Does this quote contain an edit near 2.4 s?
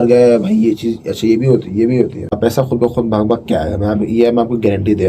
yes; 1 cut; at 2.4 s

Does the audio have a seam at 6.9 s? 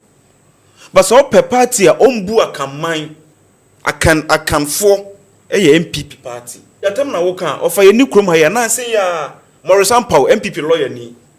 yes; 1 cut; at 6.9 s

